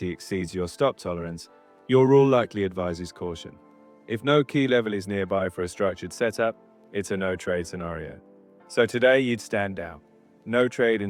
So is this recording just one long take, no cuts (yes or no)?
yes